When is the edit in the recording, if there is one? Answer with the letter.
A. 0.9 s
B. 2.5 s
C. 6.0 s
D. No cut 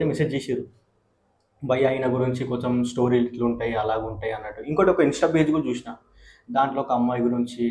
D